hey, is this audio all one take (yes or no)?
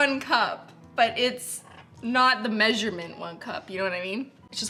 yes